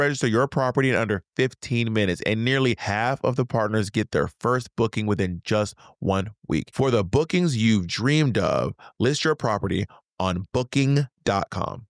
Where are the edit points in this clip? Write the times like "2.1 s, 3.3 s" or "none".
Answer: 2.8 s, 6.7 s